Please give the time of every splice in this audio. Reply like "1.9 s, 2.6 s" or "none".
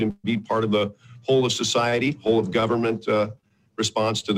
none